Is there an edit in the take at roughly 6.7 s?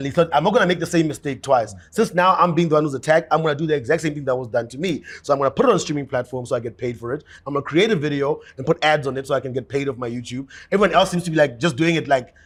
no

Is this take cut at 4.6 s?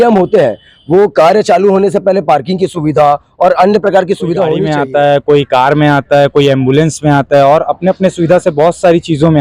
yes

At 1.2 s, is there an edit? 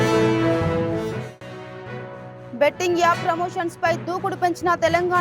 yes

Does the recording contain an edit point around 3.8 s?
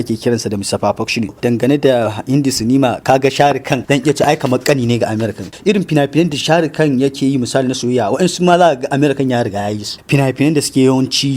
yes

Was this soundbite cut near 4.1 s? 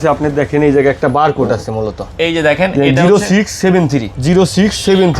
yes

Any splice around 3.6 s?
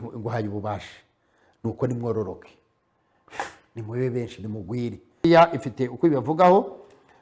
no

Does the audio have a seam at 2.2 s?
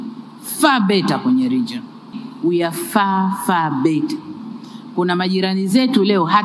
yes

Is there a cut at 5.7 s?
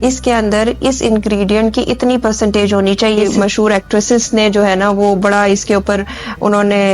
no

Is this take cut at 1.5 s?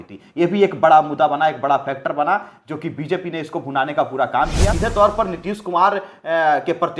no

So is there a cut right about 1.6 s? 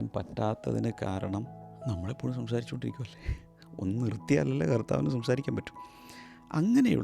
no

